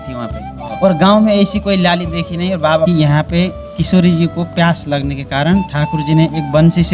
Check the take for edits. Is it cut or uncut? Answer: cut